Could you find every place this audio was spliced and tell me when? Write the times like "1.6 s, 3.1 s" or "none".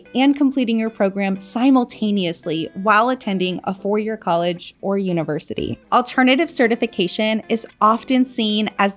5.8 s